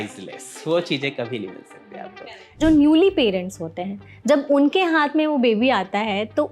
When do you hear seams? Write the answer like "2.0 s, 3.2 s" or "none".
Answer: 2.6 s

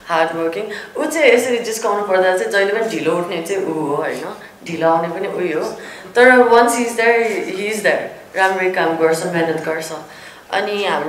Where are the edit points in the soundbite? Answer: none

